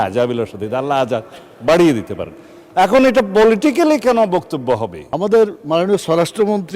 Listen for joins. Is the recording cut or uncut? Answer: cut